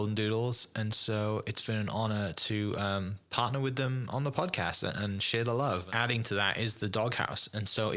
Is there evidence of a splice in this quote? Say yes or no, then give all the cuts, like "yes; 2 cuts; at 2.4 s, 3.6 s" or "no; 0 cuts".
yes; 1 cut; at 5.9 s